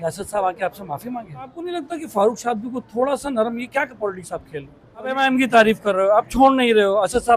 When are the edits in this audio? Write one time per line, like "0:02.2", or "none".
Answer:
0:01.7
0:05.1